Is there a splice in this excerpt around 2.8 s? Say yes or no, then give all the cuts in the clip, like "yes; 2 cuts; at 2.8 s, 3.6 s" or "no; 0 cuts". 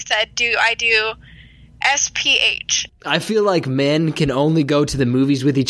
yes; 1 cut; at 2.8 s